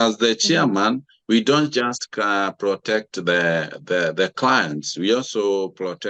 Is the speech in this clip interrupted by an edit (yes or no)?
no